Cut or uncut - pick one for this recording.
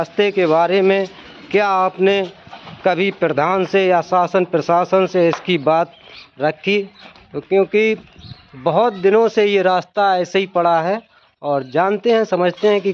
uncut